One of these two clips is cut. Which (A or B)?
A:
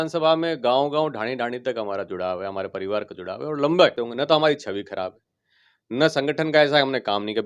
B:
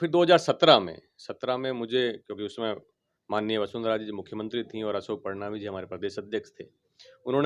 A